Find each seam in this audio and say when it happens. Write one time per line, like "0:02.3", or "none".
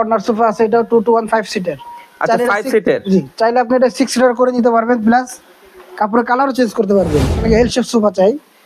0:07.4